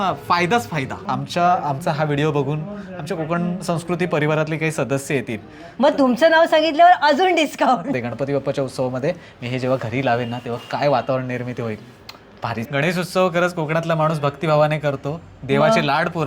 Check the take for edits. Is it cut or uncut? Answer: cut